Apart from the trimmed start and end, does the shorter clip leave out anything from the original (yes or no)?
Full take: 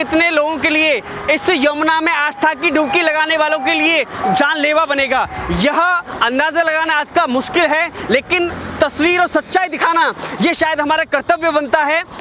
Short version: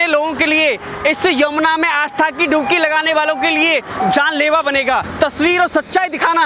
yes